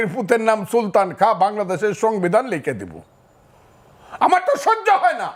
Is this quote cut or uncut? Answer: uncut